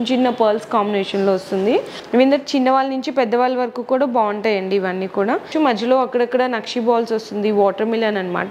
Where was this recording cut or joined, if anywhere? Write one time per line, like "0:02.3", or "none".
0:02.0
0:05.5

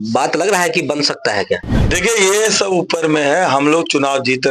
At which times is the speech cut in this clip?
0:01.7

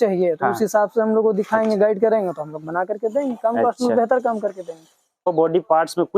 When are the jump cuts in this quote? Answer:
0:05.3

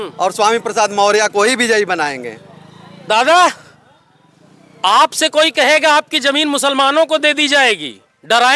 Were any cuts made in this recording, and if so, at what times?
none

